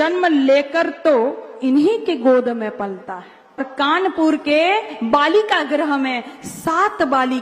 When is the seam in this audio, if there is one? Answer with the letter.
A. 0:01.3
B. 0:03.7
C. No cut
B